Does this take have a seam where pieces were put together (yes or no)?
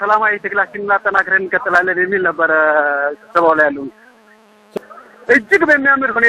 yes